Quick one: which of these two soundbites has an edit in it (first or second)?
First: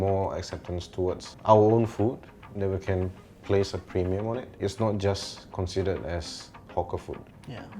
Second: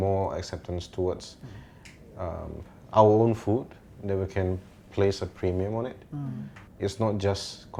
first